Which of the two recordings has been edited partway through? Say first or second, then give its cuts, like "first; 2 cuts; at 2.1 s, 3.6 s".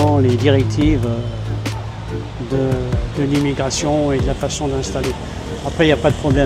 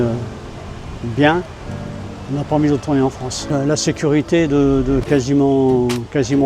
second; 1 cut; at 3.5 s